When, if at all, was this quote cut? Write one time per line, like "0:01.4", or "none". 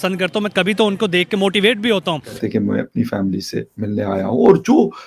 0:02.3